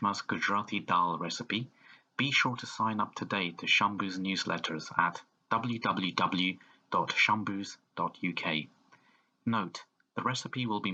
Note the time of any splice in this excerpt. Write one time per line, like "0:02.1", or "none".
none